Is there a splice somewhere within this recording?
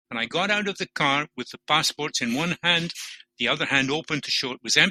no; 0 cuts

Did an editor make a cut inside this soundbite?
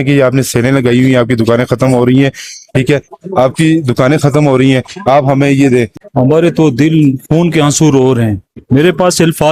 yes; 1 cut; at 6.0 s

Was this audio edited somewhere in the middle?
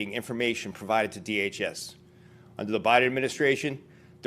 yes; 1 cut; at 2.7 s

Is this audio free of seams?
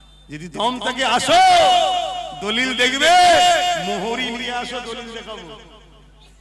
yes; 0 cuts

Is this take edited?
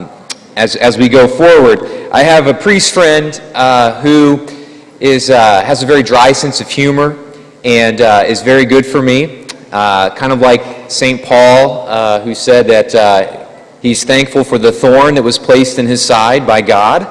yes; 1 cut; at 11.7 s

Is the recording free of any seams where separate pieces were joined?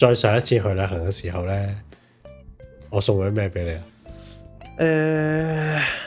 yes; 0 cuts

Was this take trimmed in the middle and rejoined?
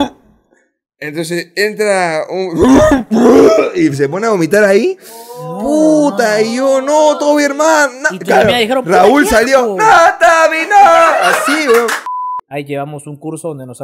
yes; 1 cut; at 12.1 s

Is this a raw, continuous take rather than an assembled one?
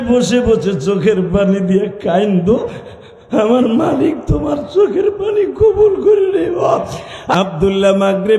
no; 1 cut; at 7.3 s

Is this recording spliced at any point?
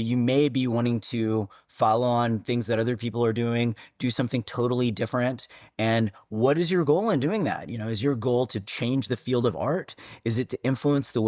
no; 0 cuts

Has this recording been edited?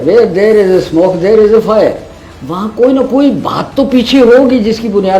no; 0 cuts

